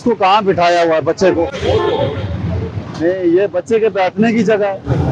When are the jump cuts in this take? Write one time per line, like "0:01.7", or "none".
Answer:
none